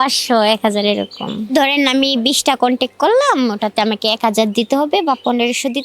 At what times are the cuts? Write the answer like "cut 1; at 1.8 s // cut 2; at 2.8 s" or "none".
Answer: cut 1; at 1.5 s